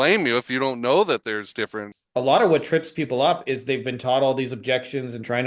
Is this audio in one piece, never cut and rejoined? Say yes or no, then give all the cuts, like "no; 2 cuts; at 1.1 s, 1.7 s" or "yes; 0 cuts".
no; 1 cut; at 1.9 s